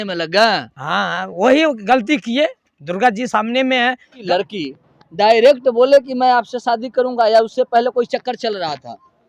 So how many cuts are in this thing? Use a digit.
1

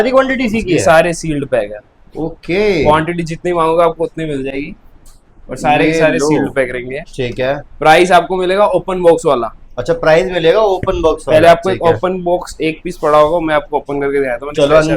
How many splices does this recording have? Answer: 0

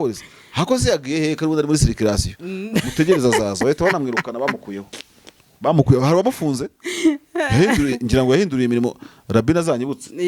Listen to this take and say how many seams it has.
0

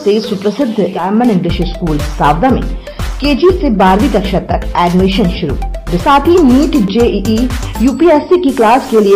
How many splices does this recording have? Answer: 2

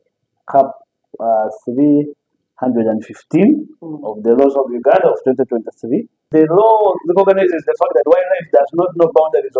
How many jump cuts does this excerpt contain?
1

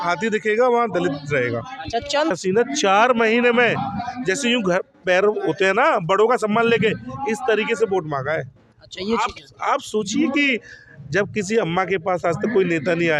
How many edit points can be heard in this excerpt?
1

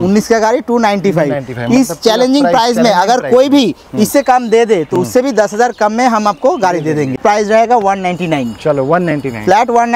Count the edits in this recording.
1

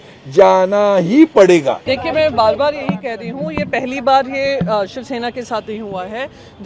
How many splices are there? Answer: 1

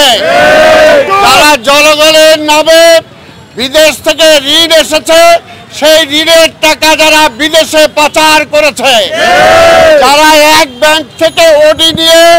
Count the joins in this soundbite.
0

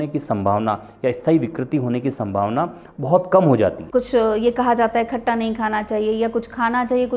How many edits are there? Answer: 1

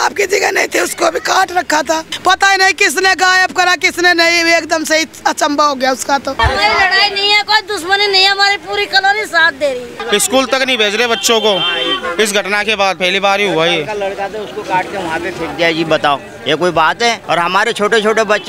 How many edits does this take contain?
5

